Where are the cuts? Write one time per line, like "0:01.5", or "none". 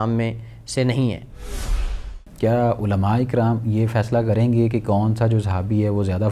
0:01.8